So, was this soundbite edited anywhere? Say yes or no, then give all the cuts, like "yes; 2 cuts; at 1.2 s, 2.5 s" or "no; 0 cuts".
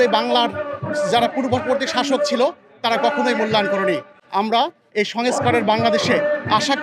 no; 0 cuts